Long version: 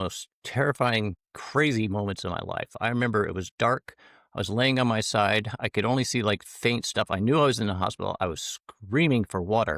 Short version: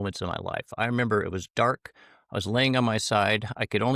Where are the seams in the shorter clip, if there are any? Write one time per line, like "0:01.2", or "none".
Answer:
none

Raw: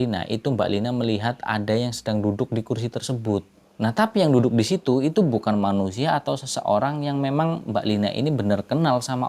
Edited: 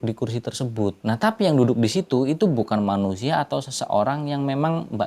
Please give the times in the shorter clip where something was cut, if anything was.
0:01.0

